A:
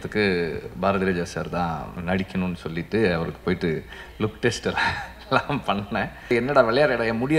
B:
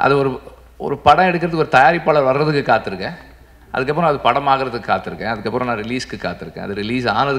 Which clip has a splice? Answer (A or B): A